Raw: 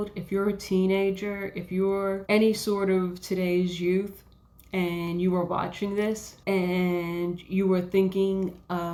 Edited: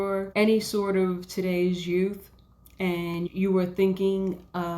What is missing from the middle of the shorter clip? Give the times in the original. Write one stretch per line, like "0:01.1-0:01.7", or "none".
0:05.2-0:07.4